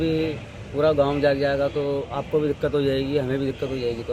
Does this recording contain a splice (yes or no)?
no